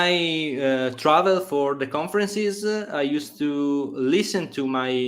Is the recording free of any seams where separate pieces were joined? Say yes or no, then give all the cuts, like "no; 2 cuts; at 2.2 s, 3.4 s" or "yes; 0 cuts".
yes; 0 cuts